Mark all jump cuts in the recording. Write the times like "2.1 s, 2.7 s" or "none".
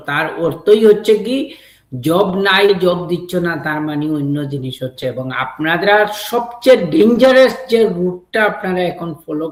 none